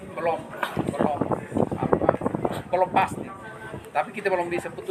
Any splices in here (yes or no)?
no